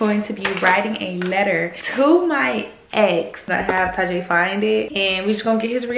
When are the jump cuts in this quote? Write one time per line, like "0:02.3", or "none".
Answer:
0:01.8
0:03.4
0:04.9